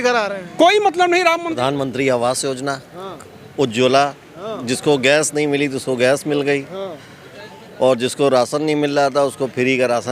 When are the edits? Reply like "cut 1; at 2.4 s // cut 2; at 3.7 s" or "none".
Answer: cut 1; at 1.6 s